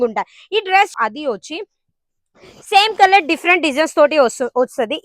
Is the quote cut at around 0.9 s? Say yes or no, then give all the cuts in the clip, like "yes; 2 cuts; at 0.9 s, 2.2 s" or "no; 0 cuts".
yes; 1 cut; at 0.9 s